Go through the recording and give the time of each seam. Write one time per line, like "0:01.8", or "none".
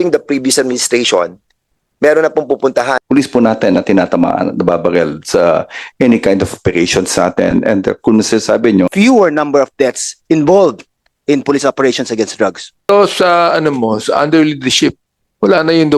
0:03.0
0:08.9
0:12.9